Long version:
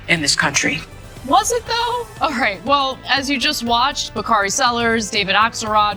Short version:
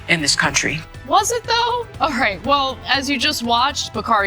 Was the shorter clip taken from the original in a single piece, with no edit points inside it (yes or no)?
no